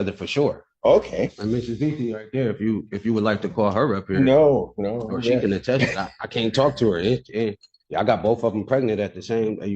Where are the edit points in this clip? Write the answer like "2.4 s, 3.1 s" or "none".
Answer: 2.4 s